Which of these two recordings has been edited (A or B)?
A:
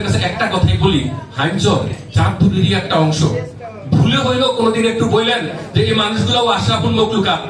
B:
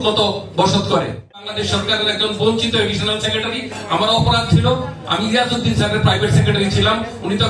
B